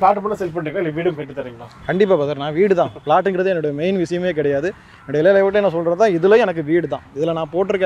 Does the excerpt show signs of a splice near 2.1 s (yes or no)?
no